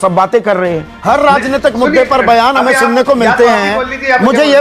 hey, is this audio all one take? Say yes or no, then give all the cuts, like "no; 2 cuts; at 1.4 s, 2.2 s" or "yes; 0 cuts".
no; 1 cut; at 0.9 s